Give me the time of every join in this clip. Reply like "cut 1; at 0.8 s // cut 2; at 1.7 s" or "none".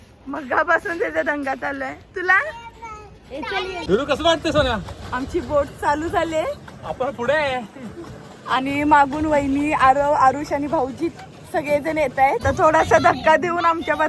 cut 1; at 3.8 s // cut 2; at 12.4 s